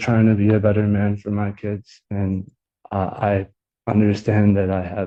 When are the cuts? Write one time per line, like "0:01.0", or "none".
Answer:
none